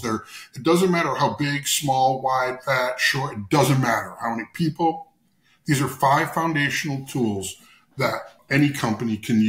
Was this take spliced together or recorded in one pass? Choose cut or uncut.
cut